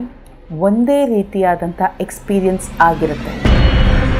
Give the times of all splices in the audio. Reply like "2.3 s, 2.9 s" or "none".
3.3 s

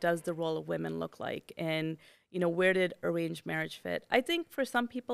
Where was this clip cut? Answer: none

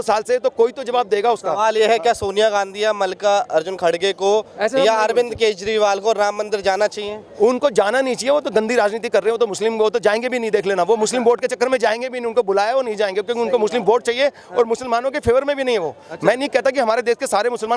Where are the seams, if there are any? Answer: none

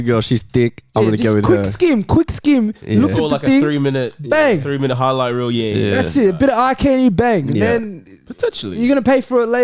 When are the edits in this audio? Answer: none

